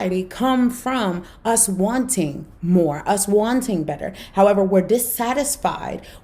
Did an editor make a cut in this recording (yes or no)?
no